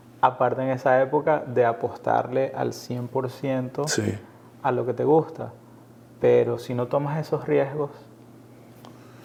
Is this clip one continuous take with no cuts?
yes; 0 cuts

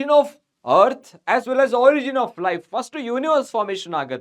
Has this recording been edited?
no; 0 cuts

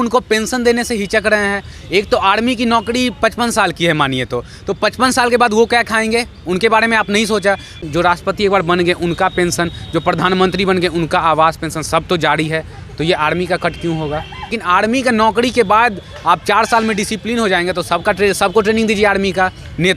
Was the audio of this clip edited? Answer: yes; 2 cuts; at 7.8 s, 14.6 s

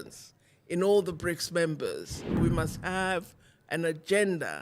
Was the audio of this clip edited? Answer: yes; 1 cut; at 2.4 s

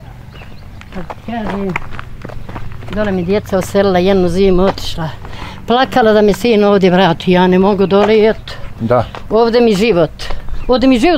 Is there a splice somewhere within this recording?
no; 0 cuts

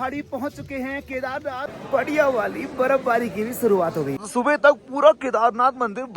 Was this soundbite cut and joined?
yes; 2 cuts; at 1.7 s, 4.2 s

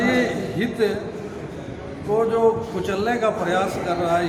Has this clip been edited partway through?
no; 0 cuts

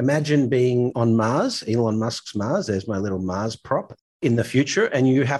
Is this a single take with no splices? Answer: no; 1 cut; at 0.9 s

